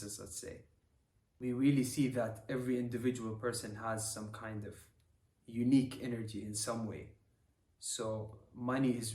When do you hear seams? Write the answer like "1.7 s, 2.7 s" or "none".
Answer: 1.4 s